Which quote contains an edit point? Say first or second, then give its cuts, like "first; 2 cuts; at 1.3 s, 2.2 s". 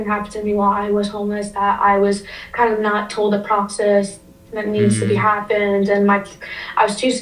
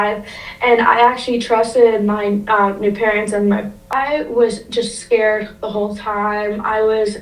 second; 1 cut; at 3.9 s